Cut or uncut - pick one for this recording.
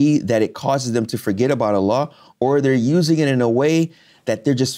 uncut